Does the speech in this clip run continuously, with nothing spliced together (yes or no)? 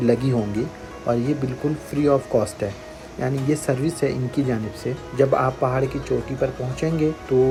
yes